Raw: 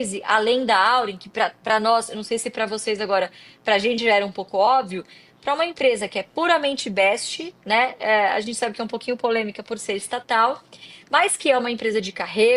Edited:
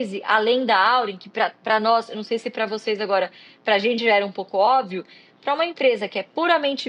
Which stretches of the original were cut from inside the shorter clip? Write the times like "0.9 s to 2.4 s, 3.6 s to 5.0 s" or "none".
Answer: none

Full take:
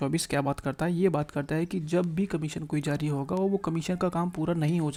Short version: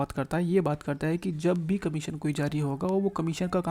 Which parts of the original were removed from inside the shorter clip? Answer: none

